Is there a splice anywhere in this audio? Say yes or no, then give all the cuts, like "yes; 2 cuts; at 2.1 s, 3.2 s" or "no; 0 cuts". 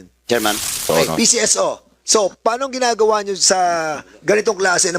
yes; 1 cut; at 0.9 s